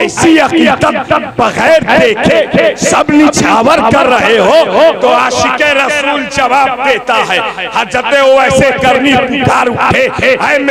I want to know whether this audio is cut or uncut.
uncut